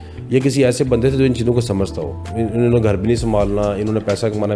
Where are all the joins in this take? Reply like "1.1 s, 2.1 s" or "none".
2.2 s